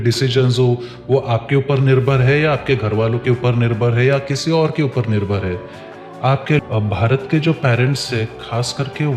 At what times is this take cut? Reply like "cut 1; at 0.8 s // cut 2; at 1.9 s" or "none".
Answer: cut 1; at 6.6 s